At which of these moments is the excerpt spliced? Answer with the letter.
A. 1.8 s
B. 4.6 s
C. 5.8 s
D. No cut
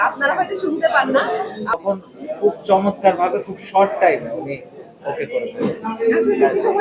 A